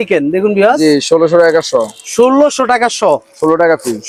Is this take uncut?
yes; 0 cuts

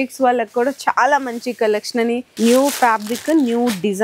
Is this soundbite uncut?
no; 1 cut; at 2.3 s

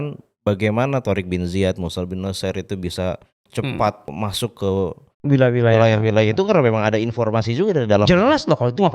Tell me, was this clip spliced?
yes; 1 cut; at 4.1 s

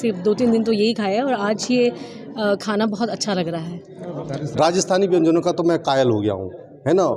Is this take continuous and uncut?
no; 1 cut; at 4.1 s

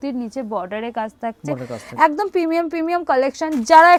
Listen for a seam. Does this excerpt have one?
no; 0 cuts

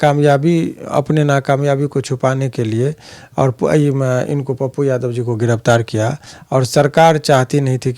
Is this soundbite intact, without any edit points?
yes; 0 cuts

